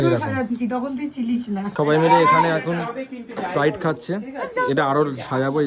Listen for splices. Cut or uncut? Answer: cut